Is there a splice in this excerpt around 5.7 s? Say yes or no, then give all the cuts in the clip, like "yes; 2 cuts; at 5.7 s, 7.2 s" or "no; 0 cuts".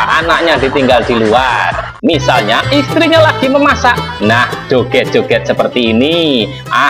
no; 1 cut; at 1.9 s